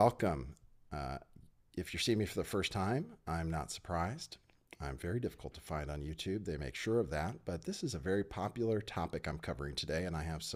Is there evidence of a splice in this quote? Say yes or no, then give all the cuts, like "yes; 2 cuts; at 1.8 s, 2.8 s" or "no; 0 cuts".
no; 0 cuts